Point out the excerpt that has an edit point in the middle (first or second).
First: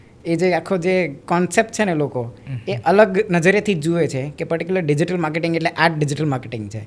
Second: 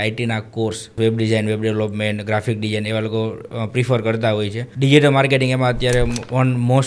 second